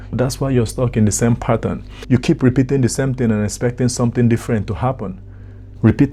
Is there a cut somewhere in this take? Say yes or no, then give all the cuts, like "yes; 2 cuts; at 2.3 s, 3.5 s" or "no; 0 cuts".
no; 0 cuts